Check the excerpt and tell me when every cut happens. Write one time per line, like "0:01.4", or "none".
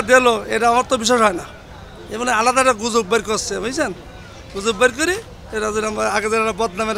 none